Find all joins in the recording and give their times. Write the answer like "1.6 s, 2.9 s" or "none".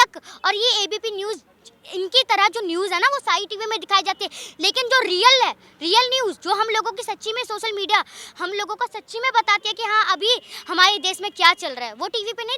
none